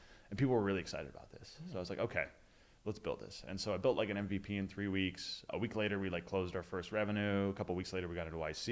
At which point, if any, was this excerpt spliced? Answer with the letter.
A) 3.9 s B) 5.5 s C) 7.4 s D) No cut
B